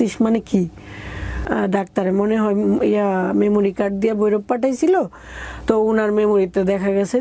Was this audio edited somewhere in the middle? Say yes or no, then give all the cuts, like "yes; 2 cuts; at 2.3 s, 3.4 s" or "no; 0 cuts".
yes; 1 cut; at 1.4 s